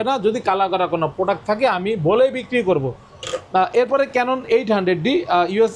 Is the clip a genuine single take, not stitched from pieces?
yes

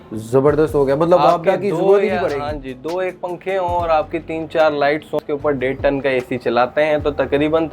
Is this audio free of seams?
no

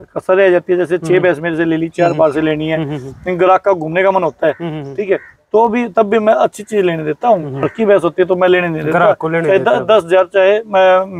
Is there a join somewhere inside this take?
no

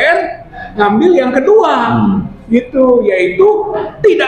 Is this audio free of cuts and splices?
yes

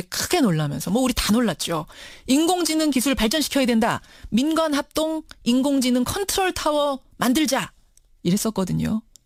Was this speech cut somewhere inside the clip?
no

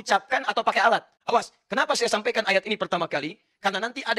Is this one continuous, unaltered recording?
no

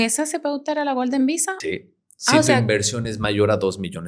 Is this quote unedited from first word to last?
no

